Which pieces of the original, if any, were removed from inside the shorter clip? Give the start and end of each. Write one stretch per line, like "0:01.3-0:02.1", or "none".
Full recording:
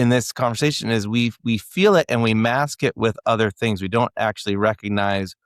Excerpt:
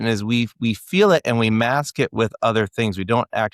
none